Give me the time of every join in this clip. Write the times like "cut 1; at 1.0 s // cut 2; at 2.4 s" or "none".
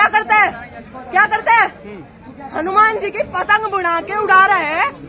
none